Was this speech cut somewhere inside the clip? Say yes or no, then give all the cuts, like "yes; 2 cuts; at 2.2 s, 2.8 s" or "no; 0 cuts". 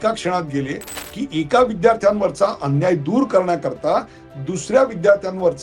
yes; 1 cut; at 1.0 s